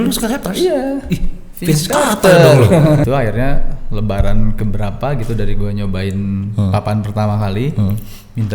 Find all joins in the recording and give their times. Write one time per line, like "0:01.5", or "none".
0:03.0